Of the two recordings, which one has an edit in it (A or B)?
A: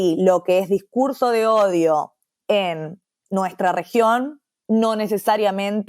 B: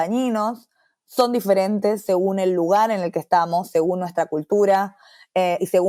A